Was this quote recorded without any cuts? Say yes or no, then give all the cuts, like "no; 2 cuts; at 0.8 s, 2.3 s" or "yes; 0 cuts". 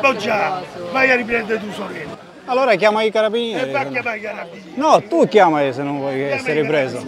yes; 0 cuts